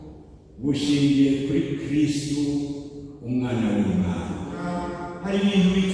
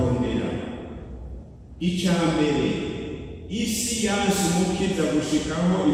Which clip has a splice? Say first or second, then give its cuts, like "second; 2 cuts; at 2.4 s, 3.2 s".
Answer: first; 1 cut; at 4.7 s